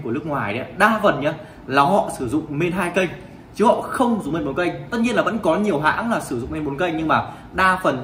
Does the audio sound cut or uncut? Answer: uncut